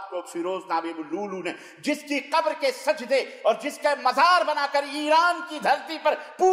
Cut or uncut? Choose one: uncut